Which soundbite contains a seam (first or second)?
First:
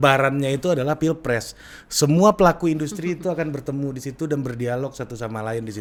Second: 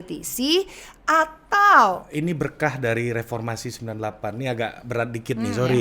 second